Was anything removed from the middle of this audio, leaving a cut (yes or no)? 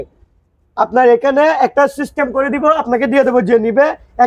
no